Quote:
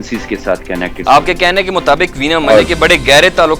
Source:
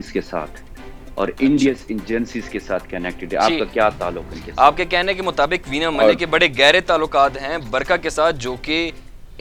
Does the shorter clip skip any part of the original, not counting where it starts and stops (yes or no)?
yes